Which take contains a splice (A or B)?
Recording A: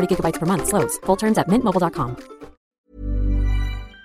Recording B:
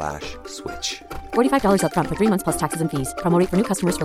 A